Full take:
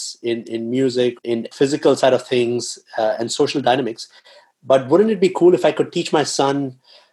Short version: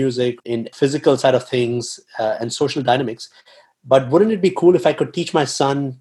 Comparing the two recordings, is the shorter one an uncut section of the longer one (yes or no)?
yes